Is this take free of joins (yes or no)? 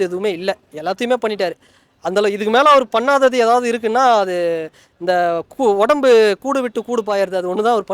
yes